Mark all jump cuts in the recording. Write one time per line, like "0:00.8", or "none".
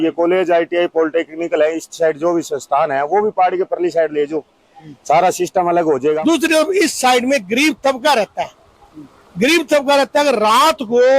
0:06.2